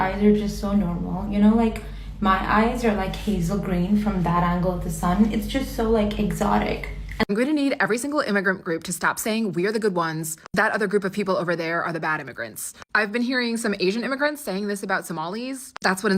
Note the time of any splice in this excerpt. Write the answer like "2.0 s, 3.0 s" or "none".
7.0 s